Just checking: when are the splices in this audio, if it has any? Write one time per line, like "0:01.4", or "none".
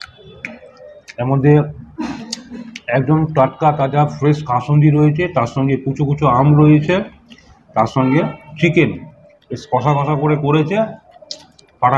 none